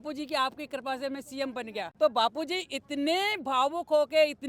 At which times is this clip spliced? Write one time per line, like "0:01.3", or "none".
0:01.9